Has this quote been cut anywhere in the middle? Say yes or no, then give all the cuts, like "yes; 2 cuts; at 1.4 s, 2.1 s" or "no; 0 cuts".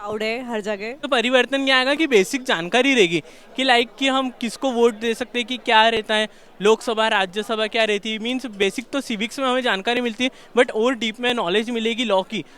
yes; 1 cut; at 1.0 s